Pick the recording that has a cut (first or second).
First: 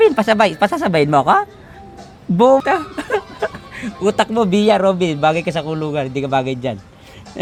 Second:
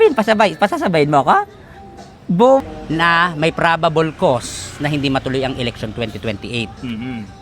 second